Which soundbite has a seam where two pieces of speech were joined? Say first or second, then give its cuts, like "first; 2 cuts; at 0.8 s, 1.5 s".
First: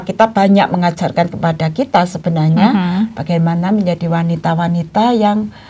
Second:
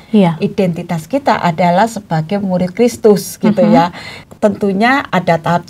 second; 1 cut; at 4.2 s